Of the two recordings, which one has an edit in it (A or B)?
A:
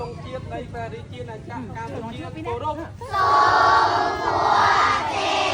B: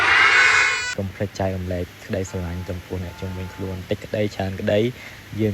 B